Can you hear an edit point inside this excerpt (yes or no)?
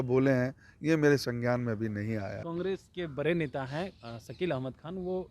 yes